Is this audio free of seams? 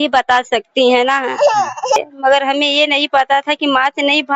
no; 1 cut; at 2.0 s

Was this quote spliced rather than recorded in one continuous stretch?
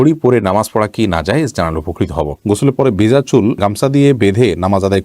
yes; 1 cut; at 2.4 s

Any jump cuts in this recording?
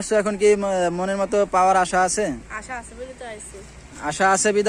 no; 0 cuts

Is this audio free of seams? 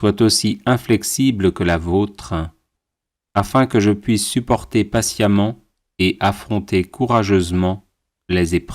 no; 1 cut; at 3.7 s

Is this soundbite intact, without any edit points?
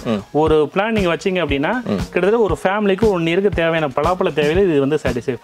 no; 1 cut; at 3.9 s

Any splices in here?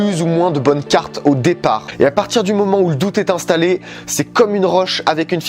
yes; 1 cut; at 1.9 s

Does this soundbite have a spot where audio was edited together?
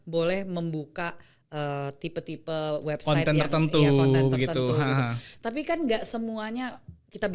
no; 0 cuts

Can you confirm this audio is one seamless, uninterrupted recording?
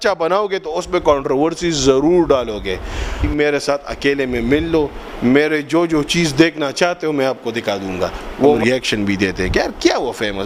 no; 2 cuts; at 3.3 s, 8.5 s

